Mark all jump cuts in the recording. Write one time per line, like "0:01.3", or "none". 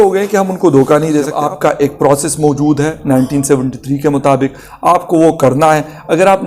0:01.4